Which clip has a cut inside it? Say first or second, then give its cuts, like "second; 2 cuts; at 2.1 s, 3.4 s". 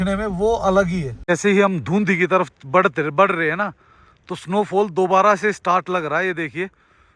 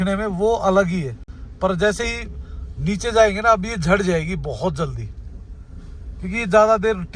first; 1 cut; at 1.1 s